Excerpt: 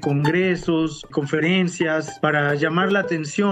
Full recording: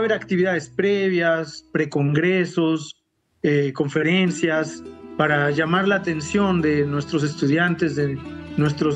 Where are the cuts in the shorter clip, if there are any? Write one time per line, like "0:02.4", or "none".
0:01.1
0:02.1